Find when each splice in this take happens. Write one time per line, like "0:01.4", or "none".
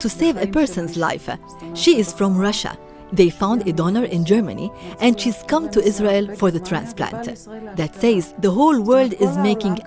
none